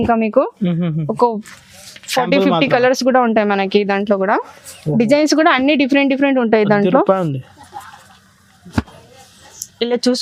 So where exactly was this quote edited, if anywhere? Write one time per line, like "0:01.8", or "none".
none